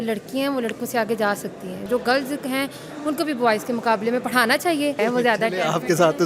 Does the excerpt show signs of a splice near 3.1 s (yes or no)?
no